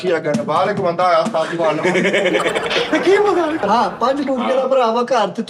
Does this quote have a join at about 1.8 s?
no; 1 cut; at 3.6 s

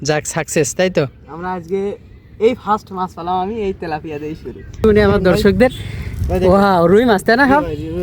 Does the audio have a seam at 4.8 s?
yes; 1 cut; at 4.8 s

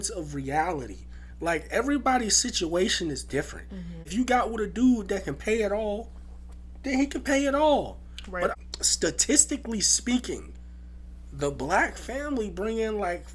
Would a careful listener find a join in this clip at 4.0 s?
yes; 2 cuts; at 4.0 s, 8.5 s

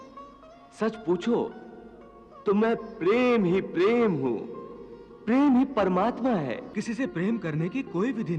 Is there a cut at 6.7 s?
yes; 1 cut; at 6.7 s

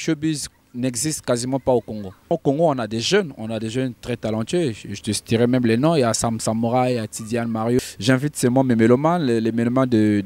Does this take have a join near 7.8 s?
yes; 2 cuts; at 2.3 s, 7.8 s

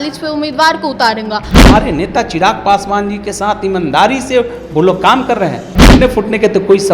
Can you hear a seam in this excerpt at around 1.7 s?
yes; 2 cuts; at 1.7 s, 5.9 s

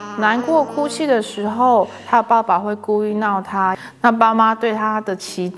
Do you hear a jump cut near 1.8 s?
no; 1 cut; at 3.8 s

